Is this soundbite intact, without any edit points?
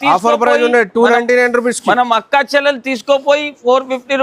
yes; 0 cuts

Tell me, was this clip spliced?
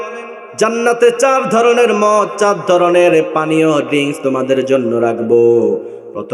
no; 0 cuts

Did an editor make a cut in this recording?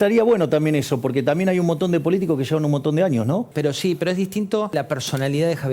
yes; 2 cuts; at 3.5 s, 4.7 s

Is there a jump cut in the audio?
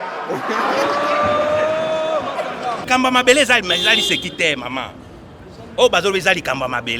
yes; 1 cut; at 2.8 s

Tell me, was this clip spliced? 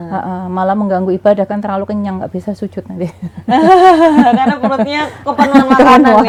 no; 0 cuts

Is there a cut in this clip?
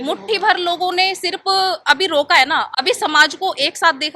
yes; 1 cut; at 2.7 s

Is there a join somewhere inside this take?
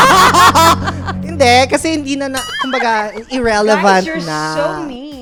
no; 0 cuts

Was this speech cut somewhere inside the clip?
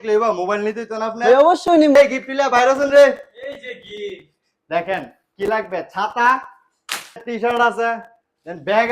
yes; 2 cuts; at 1.9 s, 7.2 s

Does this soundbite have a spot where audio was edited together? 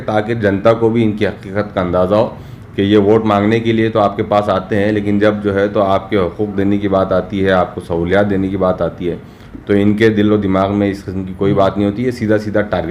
no; 0 cuts

